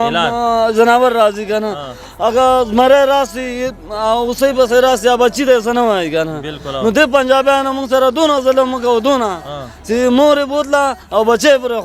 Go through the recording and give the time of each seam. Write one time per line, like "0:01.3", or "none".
none